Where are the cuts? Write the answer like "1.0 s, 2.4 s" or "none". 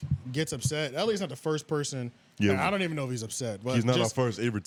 none